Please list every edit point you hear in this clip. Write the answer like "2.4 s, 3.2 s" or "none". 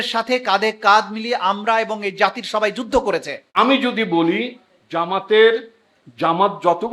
3.4 s